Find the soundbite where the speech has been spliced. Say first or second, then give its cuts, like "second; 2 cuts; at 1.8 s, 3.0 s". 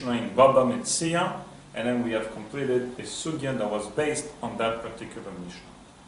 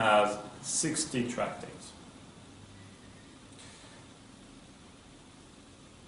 second; 1 cut; at 3.8 s